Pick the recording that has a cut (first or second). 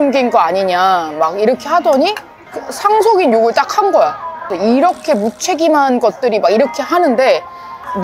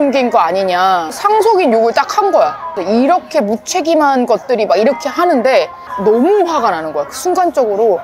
second